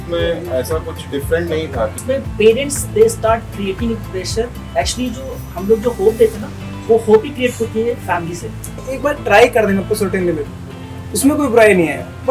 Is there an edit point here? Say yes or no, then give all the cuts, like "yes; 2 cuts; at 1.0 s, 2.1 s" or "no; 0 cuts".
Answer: yes; 2 cuts; at 2.0 s, 8.8 s